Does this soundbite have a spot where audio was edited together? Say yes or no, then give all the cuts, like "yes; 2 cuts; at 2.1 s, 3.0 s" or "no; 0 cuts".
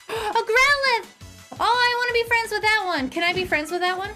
no; 0 cuts